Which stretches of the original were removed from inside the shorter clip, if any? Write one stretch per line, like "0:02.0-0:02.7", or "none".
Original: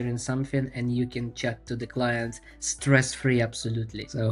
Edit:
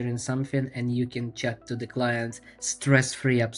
none